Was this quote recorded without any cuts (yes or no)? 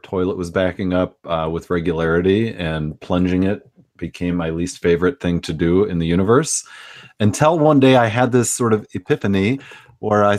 yes